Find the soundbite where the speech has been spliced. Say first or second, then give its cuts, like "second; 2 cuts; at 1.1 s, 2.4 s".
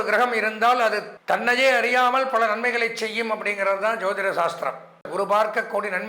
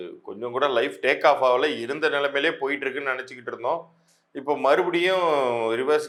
first; 2 cuts; at 1.1 s, 5.1 s